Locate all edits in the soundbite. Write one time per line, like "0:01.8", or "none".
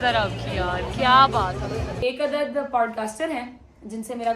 0:02.0